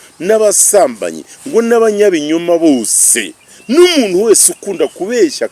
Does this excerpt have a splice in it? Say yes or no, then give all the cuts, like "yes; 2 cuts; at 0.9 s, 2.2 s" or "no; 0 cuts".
no; 0 cuts